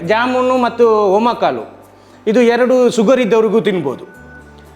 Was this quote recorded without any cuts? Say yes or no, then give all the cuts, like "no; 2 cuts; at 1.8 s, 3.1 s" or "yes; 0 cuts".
yes; 0 cuts